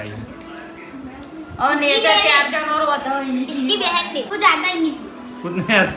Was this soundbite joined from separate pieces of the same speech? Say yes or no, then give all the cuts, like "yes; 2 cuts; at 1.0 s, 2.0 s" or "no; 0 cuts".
yes; 1 cut; at 4.3 s